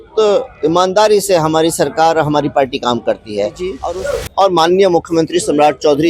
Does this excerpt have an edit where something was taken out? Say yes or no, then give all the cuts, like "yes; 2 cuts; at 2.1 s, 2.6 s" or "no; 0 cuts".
yes; 1 cut; at 3.8 s